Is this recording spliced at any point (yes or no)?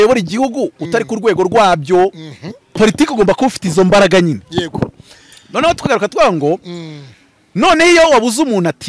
yes